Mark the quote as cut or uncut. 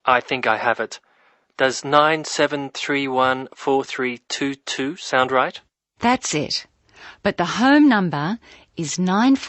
uncut